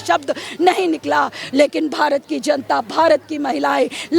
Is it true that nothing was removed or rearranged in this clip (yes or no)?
yes